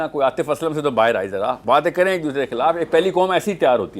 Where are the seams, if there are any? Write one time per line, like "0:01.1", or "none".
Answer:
0:01.6